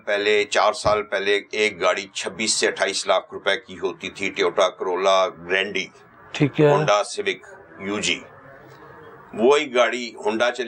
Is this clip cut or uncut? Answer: uncut